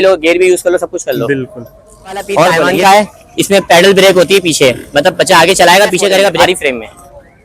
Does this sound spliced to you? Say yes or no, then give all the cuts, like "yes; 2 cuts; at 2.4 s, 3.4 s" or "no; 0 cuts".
yes; 2 cuts; at 2.7 s, 6.4 s